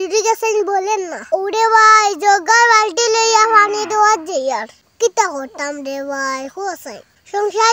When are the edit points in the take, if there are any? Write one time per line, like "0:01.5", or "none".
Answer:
0:04.7